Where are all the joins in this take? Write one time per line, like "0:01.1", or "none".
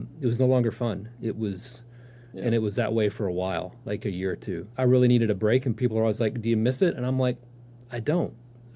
0:04.7